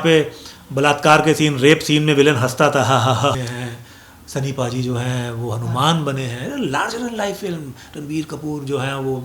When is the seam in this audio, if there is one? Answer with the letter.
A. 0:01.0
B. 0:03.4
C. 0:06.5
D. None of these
B